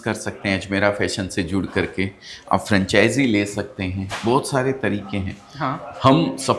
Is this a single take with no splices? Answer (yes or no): yes